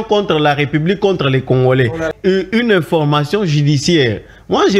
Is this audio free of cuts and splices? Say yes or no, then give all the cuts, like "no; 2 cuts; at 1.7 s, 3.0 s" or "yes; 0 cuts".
no; 1 cut; at 2.1 s